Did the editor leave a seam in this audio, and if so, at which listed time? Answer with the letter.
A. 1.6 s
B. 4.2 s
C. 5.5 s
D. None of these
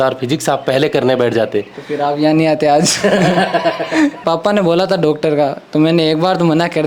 B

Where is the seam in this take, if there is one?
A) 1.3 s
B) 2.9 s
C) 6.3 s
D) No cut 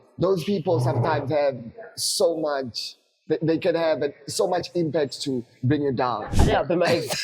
C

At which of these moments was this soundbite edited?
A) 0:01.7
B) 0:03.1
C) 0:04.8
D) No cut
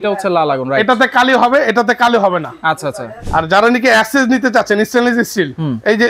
B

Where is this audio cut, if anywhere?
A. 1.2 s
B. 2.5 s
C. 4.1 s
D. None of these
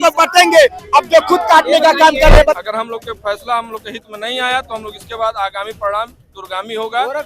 B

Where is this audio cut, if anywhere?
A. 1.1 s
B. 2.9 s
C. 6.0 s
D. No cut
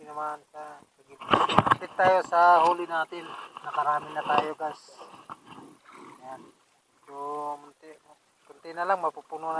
A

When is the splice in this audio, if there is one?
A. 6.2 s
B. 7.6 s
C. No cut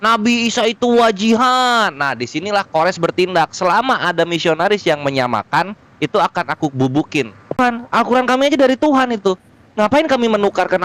B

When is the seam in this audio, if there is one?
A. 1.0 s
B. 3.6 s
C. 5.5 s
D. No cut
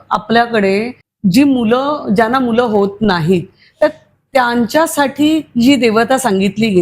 A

